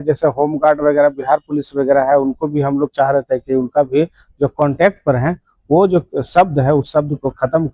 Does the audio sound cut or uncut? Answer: uncut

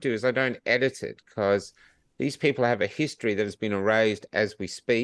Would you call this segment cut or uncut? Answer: uncut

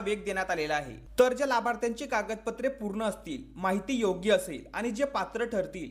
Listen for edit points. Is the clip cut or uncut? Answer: cut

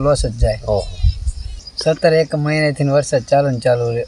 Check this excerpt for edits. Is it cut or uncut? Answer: cut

